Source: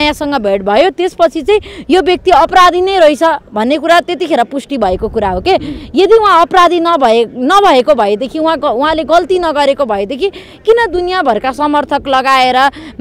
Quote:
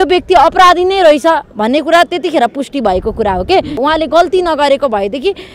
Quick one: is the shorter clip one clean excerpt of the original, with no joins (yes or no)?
no